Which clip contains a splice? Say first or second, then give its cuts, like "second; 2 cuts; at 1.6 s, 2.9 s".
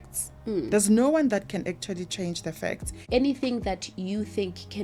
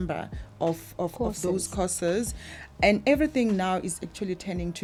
first; 1 cut; at 2.9 s